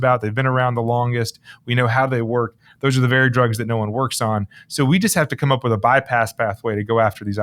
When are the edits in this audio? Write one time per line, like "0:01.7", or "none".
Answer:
none